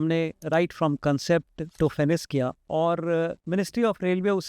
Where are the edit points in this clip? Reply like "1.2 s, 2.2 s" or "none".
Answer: 1.6 s, 2.6 s, 3.4 s